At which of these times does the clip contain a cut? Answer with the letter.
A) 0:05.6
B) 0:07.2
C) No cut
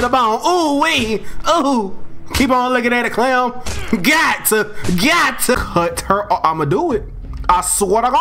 A